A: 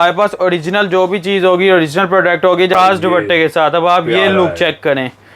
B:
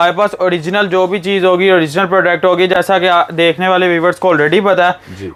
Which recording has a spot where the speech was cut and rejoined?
A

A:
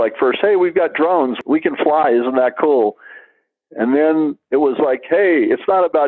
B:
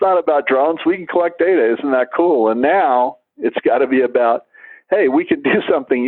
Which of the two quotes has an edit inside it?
A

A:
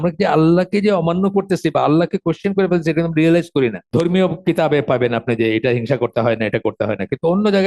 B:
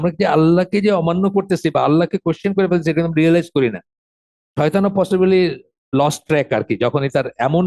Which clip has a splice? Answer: A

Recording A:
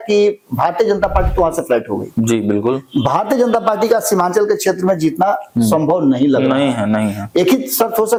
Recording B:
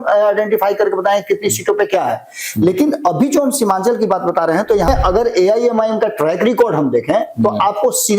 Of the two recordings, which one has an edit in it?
B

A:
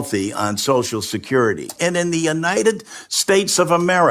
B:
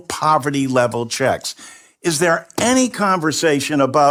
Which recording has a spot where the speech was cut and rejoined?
A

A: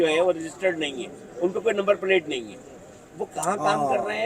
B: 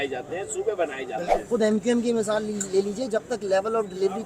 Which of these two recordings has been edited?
B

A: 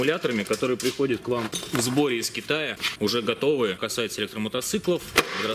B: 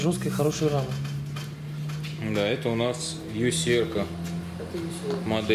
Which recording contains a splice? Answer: A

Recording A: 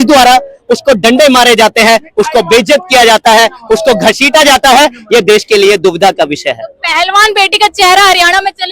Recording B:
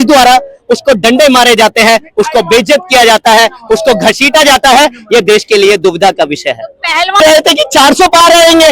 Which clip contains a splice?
B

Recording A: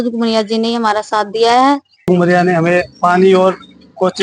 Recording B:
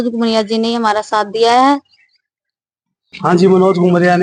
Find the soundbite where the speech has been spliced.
A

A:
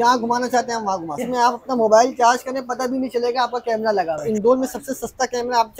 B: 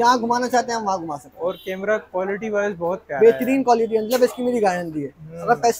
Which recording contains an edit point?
A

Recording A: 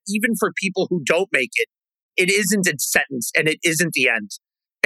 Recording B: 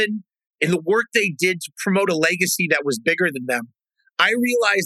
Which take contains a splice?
A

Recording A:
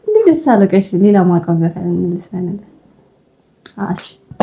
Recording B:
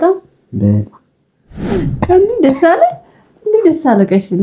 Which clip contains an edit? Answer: B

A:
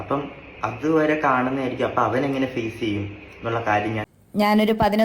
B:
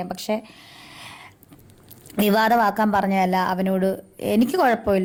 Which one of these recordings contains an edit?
A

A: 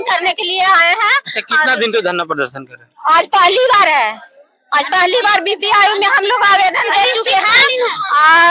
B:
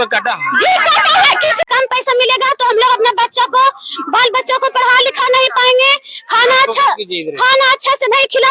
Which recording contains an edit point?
B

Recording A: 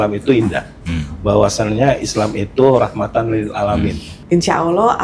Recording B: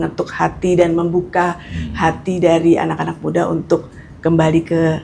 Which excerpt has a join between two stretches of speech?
A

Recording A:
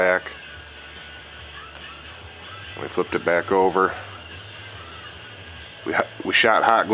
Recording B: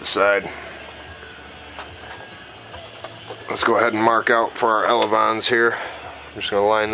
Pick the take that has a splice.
A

